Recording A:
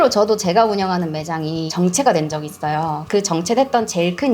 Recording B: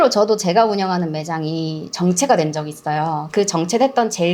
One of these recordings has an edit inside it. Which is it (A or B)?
A